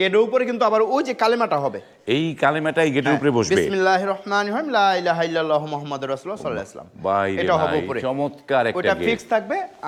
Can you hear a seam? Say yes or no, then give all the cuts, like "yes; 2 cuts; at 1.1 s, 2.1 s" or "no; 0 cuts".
no; 0 cuts